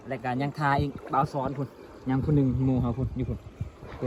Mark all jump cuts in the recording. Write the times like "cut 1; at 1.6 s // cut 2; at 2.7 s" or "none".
none